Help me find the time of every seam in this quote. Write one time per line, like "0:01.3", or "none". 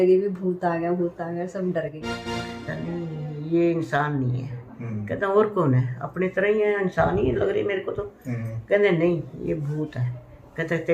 0:02.2